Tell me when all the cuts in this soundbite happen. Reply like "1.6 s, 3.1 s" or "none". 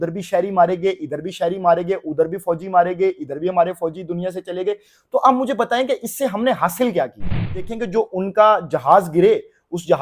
7.7 s